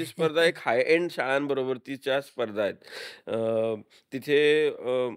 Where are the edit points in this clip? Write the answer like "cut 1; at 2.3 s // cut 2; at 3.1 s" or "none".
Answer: none